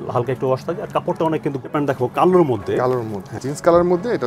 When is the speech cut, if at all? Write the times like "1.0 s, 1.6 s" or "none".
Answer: 1.6 s, 3.4 s